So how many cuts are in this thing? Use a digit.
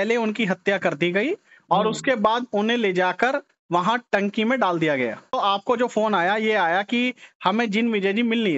1